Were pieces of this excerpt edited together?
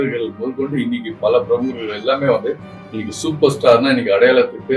no; 0 cuts

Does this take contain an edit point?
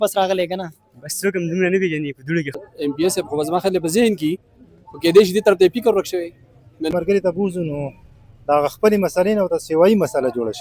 yes; 2 cuts; at 2.6 s, 6.9 s

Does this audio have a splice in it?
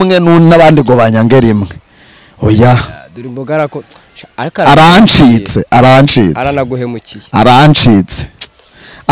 no; 0 cuts

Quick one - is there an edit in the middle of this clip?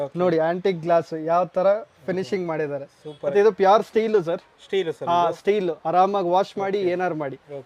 yes; 1 cut; at 3.3 s

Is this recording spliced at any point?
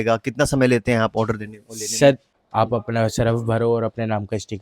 yes; 1 cut; at 2.3 s

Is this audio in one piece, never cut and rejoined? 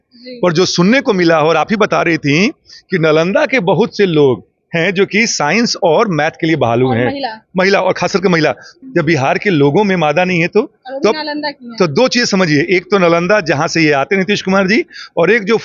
no; 1 cut; at 8.7 s

